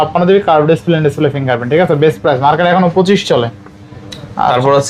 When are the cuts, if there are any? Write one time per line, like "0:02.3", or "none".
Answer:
none